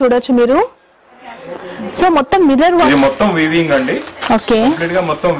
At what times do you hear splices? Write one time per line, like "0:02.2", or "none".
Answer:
0:02.9